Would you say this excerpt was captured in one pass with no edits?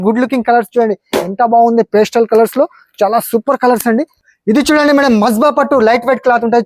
no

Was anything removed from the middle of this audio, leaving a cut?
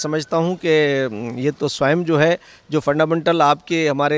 no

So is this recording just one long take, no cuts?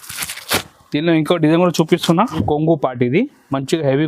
no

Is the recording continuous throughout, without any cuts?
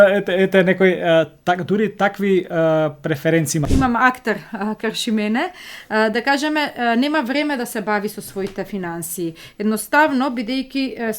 no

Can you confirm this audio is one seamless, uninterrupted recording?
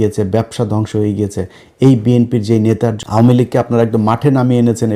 no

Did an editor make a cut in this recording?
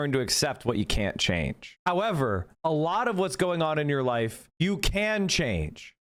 no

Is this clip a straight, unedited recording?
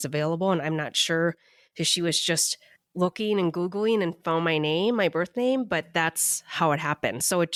yes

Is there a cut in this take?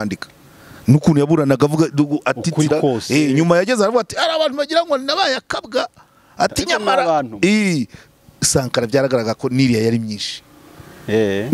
no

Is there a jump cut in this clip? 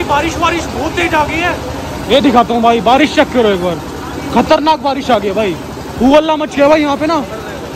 no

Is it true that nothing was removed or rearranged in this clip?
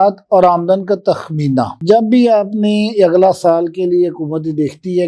yes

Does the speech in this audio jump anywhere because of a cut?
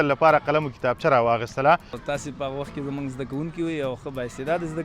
yes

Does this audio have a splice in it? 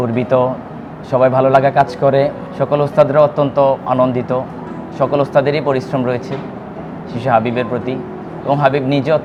no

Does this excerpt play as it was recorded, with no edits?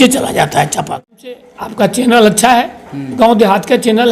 no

